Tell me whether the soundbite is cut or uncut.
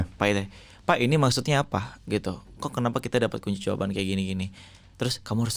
uncut